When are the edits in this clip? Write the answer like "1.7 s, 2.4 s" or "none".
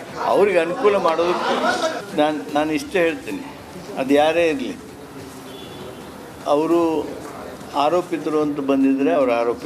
1.1 s